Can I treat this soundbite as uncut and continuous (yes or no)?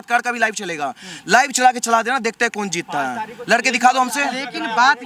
yes